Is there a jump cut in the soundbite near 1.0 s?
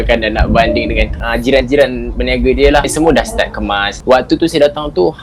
no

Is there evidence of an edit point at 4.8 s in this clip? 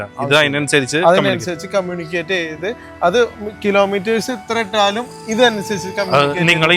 no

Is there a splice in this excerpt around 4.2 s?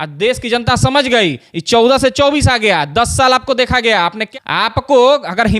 yes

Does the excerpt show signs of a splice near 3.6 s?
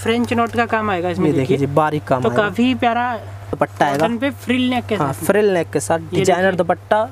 yes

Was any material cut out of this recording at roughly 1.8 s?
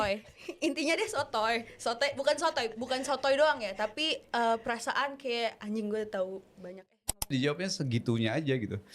no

